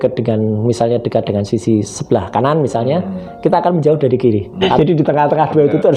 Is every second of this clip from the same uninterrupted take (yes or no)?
no